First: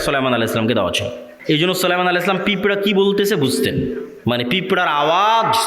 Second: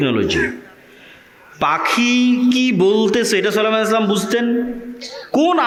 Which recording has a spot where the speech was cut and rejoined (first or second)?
first